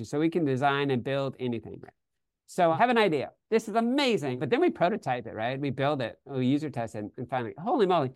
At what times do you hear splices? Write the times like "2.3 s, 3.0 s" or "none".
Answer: 2.8 s, 4.4 s

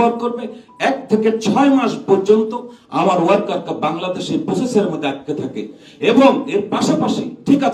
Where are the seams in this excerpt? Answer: none

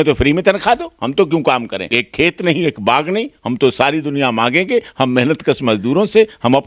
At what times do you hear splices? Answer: 1.9 s

